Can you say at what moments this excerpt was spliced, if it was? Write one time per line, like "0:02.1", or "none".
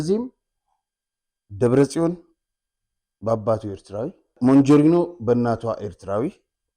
0:04.3